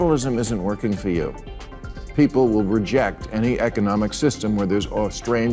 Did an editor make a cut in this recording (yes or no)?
no